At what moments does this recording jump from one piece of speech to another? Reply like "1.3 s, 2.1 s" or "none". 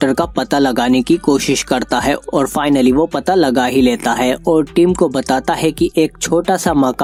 none